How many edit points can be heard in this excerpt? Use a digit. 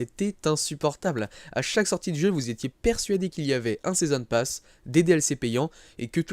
1